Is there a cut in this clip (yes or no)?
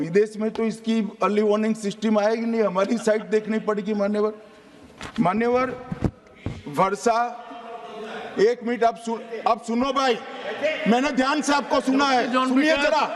no